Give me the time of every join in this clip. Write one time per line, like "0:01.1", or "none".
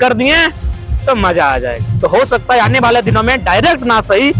0:01.8